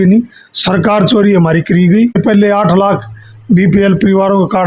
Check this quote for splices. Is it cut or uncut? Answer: cut